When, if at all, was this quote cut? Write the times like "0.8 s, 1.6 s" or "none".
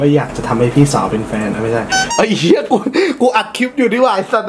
1.9 s